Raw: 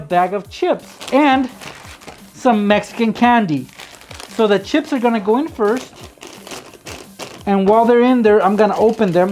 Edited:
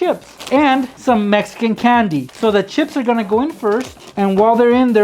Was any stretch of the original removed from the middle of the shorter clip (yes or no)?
yes